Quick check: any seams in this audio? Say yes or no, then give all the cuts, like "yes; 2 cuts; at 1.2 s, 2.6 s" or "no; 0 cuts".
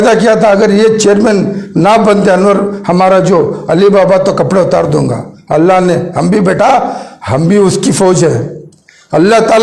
no; 0 cuts